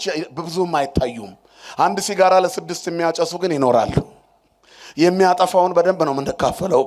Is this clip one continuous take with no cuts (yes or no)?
yes